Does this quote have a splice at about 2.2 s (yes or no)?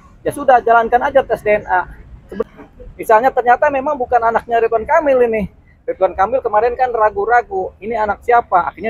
yes